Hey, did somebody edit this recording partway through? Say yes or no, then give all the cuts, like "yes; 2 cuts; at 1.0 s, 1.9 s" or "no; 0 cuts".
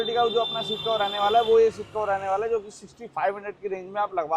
no; 0 cuts